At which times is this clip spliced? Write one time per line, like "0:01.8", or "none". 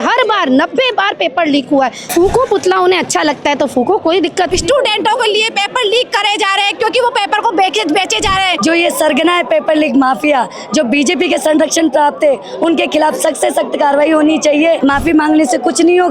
0:02.0
0:04.5
0:08.6
0:14.8